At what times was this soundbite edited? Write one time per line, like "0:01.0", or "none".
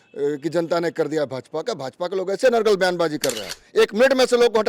0:03.6